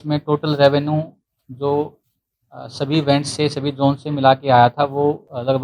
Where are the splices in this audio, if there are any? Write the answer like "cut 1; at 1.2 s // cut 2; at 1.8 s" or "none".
none